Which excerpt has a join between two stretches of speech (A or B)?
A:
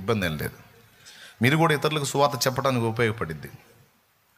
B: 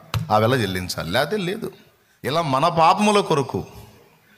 B